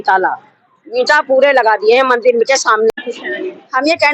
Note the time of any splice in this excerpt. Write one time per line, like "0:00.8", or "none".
0:02.9